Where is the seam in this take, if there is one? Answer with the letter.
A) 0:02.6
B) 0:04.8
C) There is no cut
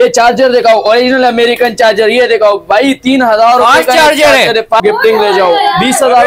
B